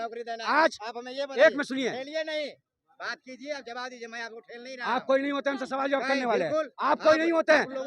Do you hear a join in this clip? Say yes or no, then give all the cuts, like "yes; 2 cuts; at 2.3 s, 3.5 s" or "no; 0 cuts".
no; 0 cuts